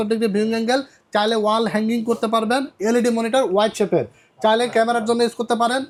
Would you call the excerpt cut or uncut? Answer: uncut